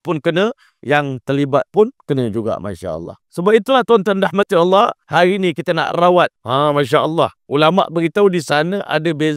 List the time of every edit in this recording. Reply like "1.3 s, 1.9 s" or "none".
3.2 s, 5.0 s, 6.4 s, 7.4 s